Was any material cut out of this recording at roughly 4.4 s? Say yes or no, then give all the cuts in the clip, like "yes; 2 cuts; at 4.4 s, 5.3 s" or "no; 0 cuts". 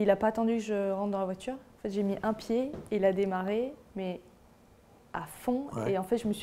no; 0 cuts